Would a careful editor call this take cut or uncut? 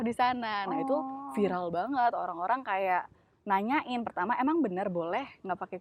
uncut